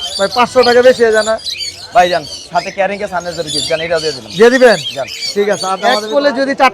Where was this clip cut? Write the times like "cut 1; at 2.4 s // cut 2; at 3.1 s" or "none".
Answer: cut 1; at 5.7 s